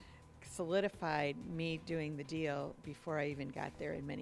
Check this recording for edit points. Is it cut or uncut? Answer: uncut